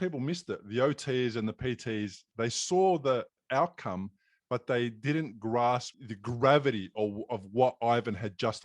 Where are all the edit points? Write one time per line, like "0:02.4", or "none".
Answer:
0:06.0